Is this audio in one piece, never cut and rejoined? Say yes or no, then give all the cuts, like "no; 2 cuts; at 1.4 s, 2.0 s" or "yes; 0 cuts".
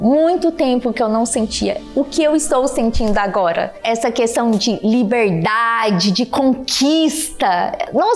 no; 1 cut; at 3.8 s